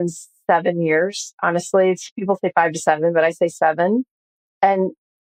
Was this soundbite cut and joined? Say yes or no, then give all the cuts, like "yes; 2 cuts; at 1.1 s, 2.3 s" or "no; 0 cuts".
no; 0 cuts